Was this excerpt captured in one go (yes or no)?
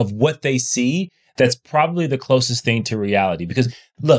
yes